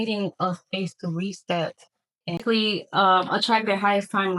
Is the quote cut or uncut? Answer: cut